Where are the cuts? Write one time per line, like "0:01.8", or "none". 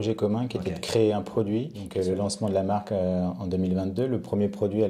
0:01.8